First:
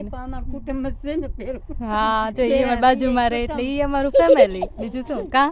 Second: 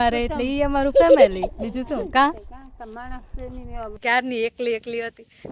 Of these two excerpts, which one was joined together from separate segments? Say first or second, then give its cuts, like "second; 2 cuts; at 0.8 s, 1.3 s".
second; 1 cut; at 3.9 s